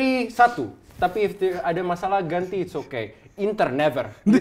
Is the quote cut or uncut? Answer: uncut